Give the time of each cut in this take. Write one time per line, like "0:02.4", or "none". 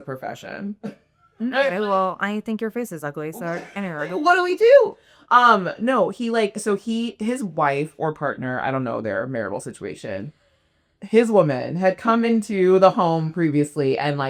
none